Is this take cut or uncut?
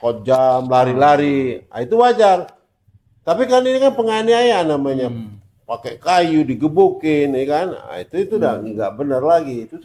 uncut